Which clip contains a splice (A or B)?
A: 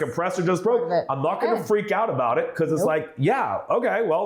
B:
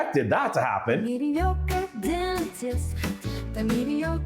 B